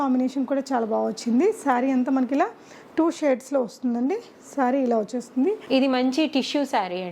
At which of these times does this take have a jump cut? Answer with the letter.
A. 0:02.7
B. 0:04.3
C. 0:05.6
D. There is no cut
C